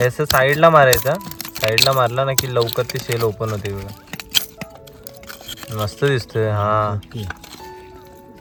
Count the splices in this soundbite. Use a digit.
0